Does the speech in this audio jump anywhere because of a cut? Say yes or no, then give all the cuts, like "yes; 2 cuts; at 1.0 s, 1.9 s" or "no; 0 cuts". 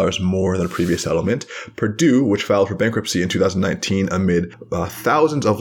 yes; 1 cut; at 4.6 s